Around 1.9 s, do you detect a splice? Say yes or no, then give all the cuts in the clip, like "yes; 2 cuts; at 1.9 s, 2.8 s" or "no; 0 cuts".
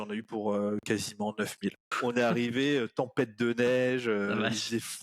yes; 1 cut; at 1.9 s